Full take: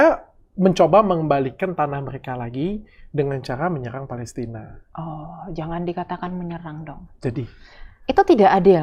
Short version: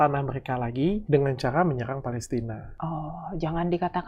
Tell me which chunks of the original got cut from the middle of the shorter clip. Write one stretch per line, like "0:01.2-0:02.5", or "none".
0:02.8-0:03.1
0:04.7-0:04.8